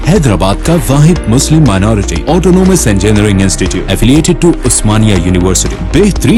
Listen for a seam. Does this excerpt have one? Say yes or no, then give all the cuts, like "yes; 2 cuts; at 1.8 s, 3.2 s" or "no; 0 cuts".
no; 0 cuts